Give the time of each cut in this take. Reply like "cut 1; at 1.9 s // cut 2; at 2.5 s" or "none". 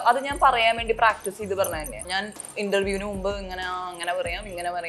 cut 1; at 2.1 s